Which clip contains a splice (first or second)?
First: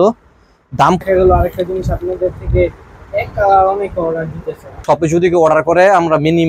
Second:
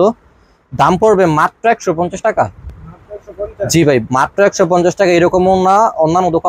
first